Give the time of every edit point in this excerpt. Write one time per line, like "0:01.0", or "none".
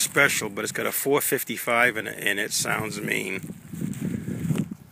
0:03.5

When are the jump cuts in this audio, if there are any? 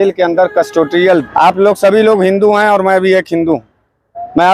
0:01.2

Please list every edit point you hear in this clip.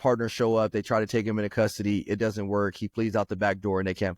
none

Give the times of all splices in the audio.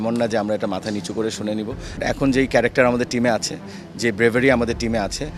0:02.0

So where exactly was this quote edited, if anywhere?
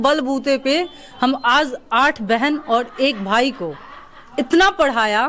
none

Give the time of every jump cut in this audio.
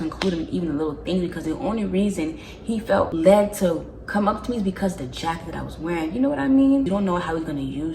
0:03.1
0:06.9

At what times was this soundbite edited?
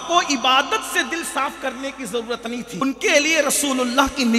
0:02.8

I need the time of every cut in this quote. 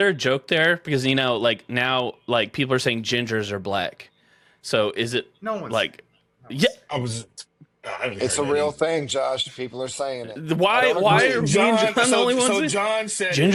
none

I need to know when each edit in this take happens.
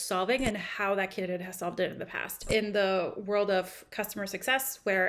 0:02.5

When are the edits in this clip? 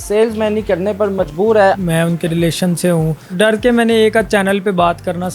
0:01.8
0:03.3

